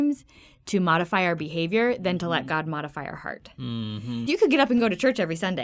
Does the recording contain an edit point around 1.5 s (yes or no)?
no